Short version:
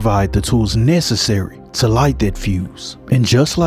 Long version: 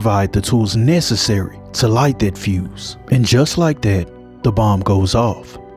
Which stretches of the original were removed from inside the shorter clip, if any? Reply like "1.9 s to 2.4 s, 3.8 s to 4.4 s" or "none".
none